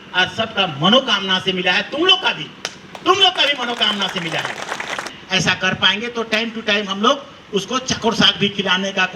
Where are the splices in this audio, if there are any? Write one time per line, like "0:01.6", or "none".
0:05.1